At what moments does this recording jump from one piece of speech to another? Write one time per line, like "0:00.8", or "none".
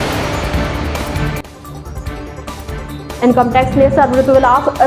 none